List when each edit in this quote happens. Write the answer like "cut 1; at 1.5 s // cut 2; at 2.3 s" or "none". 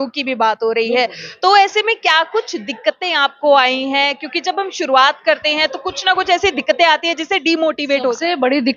none